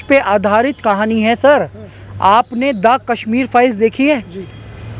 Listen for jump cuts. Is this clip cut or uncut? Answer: uncut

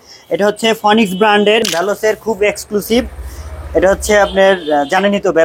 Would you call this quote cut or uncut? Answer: cut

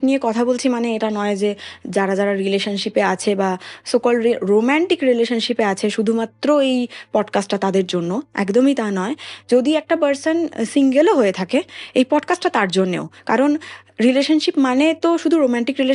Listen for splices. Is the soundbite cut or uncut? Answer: uncut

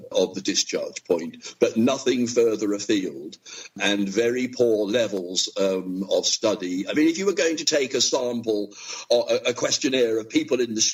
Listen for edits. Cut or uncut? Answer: uncut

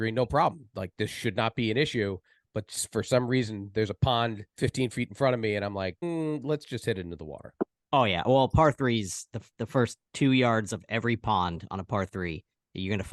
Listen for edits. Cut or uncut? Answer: cut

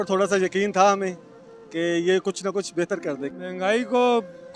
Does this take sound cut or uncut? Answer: cut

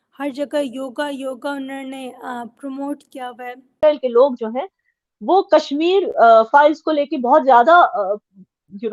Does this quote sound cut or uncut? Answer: cut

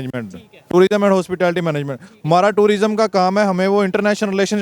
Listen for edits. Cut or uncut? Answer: uncut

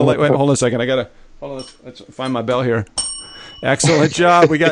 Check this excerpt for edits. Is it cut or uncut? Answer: uncut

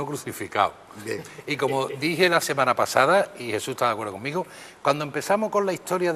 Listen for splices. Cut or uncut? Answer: cut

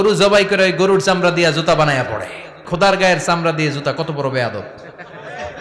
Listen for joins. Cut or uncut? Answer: cut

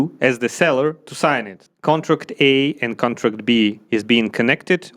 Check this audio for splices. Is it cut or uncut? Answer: cut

